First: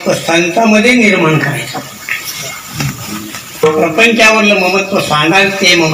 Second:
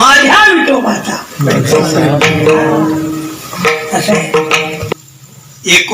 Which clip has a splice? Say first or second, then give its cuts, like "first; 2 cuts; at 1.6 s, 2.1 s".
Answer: second; 1 cut; at 4.8 s